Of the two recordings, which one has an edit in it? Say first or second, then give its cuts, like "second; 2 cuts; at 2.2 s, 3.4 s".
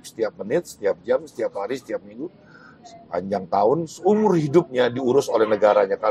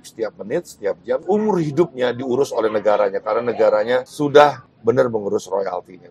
second; 3 cuts; at 1.2 s, 4.1 s, 4.7 s